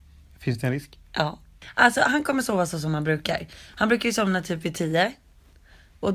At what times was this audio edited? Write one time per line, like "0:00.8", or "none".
0:01.6